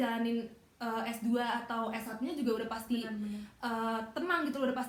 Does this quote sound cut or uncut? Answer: uncut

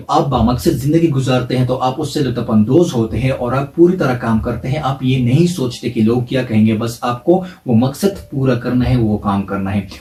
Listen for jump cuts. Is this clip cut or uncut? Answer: uncut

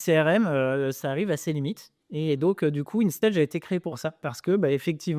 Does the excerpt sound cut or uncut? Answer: cut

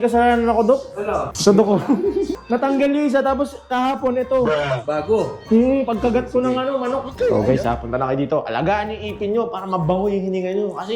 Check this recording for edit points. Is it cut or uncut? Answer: cut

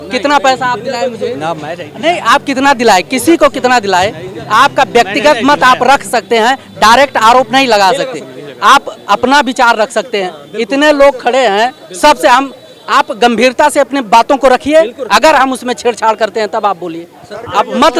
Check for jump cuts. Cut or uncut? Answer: uncut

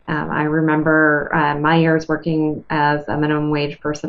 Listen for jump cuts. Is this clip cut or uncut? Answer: uncut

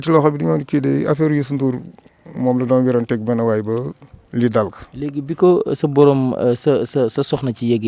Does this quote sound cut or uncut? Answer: uncut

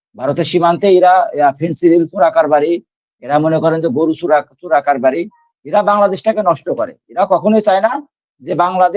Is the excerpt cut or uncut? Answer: uncut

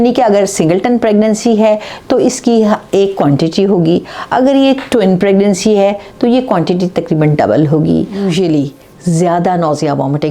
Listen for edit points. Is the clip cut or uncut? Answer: cut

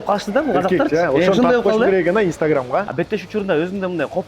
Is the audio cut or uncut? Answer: cut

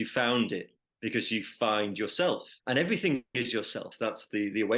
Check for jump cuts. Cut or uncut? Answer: cut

